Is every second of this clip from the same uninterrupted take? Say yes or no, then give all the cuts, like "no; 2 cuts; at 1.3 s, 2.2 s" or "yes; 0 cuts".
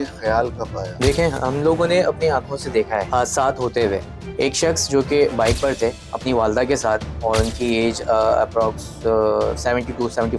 no; 3 cuts; at 0.9 s, 3.1 s, 4.2 s